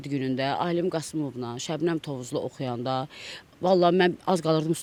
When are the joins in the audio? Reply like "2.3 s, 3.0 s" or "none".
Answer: none